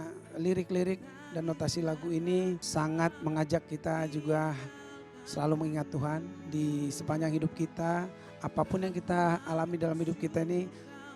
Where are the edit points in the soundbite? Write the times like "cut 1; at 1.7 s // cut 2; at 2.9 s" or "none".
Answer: cut 1; at 2.6 s

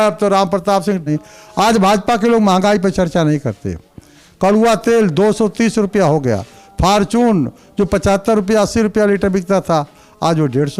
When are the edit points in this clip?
cut 1; at 1.1 s

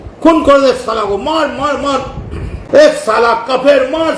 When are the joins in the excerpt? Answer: cut 1; at 2.5 s

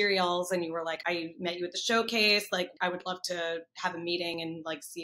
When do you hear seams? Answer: cut 1; at 1.0 s // cut 2; at 2.7 s

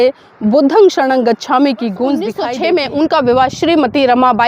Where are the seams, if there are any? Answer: cut 1; at 2.4 s

